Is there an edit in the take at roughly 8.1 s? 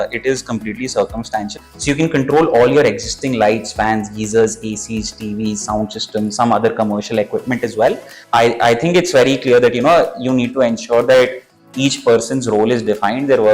yes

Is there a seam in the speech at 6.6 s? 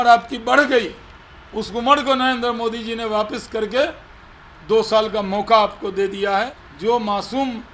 yes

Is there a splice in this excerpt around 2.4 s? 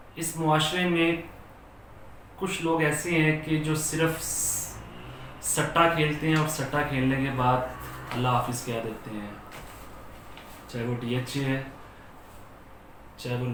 no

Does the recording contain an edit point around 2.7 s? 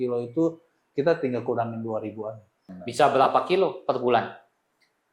yes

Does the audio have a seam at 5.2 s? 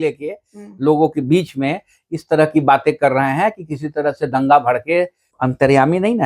yes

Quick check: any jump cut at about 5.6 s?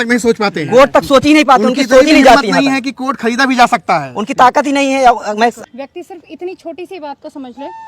yes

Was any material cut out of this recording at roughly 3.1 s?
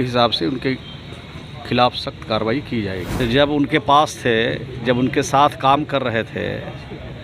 yes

